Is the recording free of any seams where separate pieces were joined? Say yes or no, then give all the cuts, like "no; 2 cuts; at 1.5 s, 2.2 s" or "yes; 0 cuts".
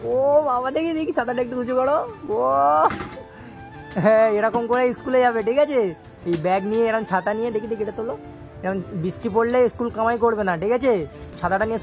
yes; 0 cuts